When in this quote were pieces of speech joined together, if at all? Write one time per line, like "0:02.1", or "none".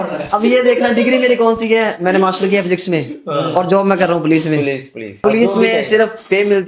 0:05.2